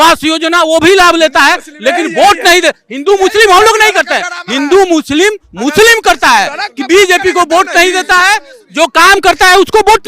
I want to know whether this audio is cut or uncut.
uncut